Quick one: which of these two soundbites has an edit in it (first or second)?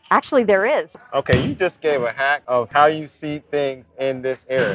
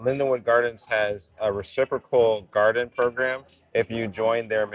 first